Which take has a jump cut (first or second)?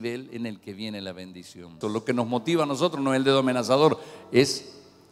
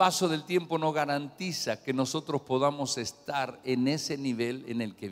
first